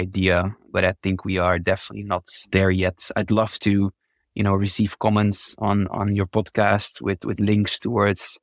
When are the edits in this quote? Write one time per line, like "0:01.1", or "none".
0:02.5